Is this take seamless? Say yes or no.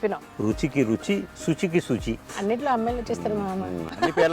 no